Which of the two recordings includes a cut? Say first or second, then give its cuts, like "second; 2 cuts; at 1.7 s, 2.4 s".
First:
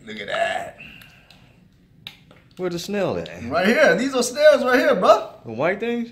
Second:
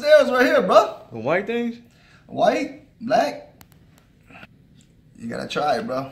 second; 1 cut; at 4.5 s